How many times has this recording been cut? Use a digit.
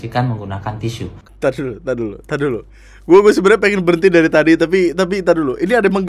1